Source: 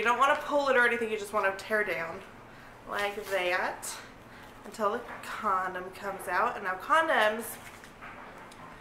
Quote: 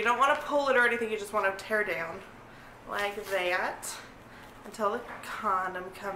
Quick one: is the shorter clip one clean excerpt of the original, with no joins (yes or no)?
yes